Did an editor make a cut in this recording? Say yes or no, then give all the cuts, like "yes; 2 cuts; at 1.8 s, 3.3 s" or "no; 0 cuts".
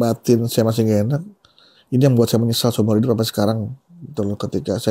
no; 0 cuts